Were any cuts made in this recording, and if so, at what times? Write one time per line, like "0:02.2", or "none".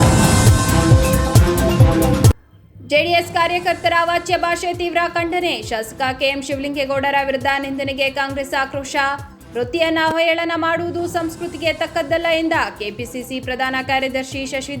0:02.3